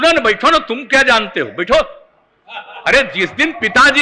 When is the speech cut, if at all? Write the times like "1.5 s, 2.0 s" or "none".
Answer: none